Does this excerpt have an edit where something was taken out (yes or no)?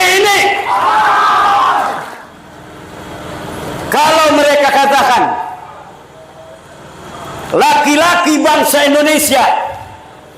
yes